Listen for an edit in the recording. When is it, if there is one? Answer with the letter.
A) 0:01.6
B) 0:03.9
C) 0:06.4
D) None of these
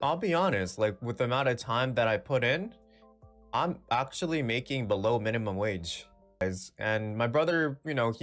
C